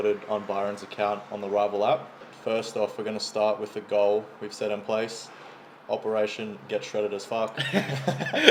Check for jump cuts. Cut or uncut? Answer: uncut